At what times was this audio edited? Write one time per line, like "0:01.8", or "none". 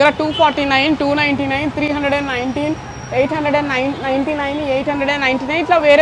none